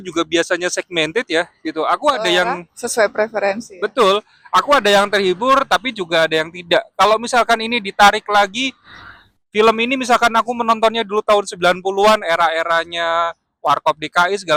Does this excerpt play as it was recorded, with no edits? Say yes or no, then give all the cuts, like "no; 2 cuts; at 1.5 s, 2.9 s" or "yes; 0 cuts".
yes; 0 cuts